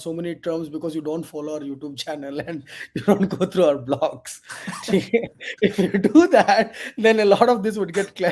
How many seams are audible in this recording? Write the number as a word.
zero